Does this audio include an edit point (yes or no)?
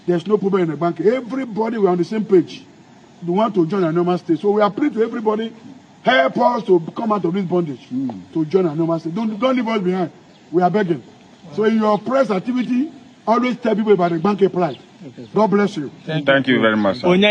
no